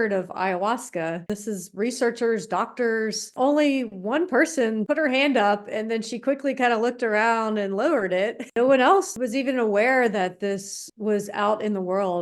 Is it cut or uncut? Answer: cut